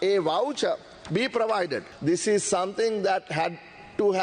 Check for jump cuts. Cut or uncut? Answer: cut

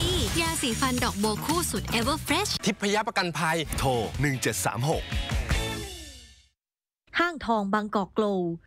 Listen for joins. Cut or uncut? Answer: cut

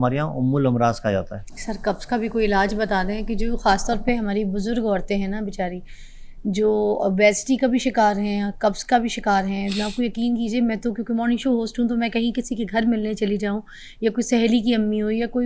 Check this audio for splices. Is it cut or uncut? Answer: uncut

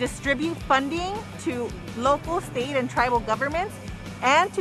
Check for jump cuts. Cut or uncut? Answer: uncut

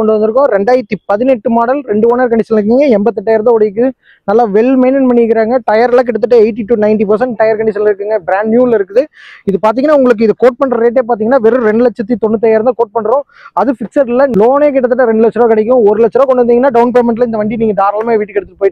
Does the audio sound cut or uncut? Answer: uncut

